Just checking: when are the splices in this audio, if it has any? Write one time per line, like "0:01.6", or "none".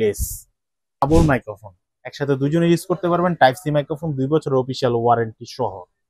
0:01.0